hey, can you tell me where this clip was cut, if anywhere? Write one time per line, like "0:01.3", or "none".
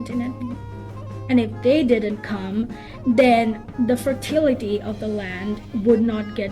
0:02.5